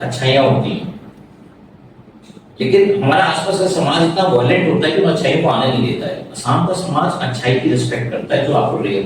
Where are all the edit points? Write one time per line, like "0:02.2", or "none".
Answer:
none